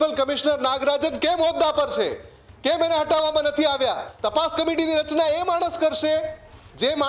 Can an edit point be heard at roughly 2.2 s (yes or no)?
no